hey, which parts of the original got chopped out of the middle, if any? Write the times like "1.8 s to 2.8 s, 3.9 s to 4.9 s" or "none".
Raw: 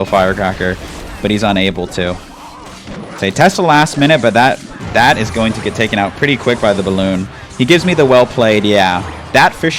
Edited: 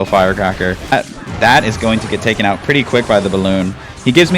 0.9 s to 4.5 s